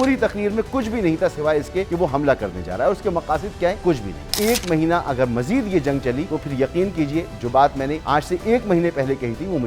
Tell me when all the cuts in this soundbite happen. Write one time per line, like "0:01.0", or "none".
0:01.9
0:04.0
0:06.3
0:08.0